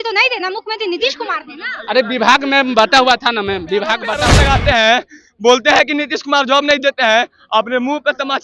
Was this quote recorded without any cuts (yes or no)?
no